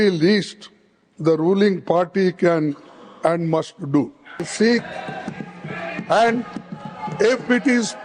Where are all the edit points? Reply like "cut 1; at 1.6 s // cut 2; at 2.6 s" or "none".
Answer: cut 1; at 4.5 s

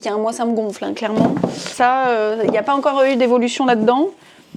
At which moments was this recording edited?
none

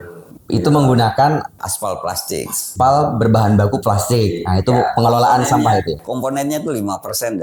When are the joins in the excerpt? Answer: none

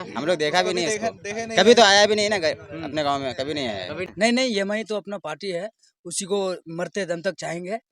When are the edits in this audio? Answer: cut 1; at 4.1 s

